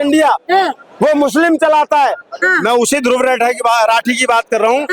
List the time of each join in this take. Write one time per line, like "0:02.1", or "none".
0:02.4